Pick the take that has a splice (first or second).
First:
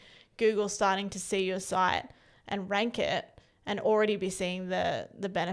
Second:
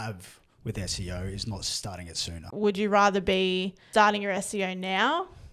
second